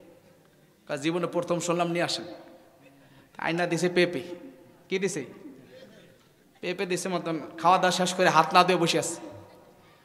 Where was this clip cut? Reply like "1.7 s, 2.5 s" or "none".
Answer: none